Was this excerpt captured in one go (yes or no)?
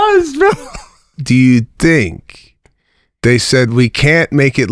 no